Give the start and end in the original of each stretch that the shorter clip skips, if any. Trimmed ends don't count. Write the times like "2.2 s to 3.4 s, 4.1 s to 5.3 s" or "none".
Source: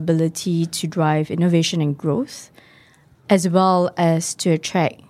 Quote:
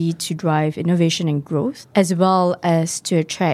2.3 s to 3.2 s